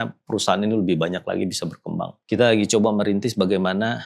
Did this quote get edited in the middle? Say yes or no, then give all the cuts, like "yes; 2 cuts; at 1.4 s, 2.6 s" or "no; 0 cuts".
yes; 1 cut; at 2.1 s